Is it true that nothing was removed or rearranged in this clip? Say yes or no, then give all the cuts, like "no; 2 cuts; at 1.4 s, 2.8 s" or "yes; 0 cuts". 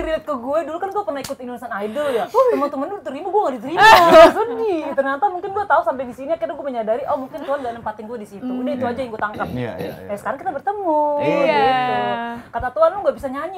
yes; 0 cuts